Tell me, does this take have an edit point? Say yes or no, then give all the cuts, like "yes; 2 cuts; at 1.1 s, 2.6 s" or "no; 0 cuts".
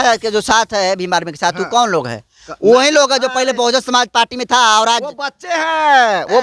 no; 0 cuts